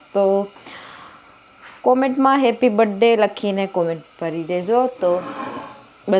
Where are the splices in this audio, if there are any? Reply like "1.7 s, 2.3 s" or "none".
none